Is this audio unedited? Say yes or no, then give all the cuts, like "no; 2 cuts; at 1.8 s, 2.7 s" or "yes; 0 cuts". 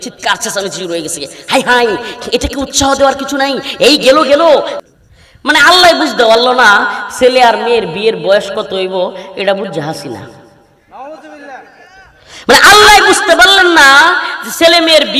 no; 1 cut; at 4.8 s